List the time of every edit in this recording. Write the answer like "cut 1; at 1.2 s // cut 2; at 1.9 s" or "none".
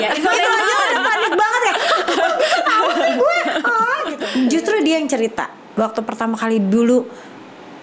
cut 1; at 4.1 s